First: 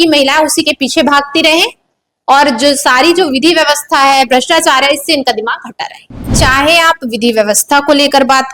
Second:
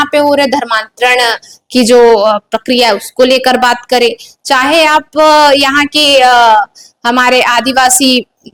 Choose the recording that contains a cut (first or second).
first